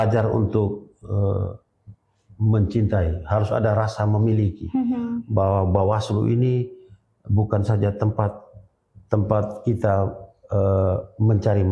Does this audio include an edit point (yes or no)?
no